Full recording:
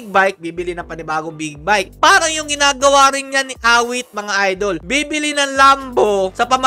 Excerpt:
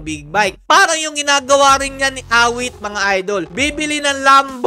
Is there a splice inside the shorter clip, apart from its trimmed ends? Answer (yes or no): no